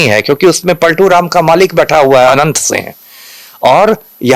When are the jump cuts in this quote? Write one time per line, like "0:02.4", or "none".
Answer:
none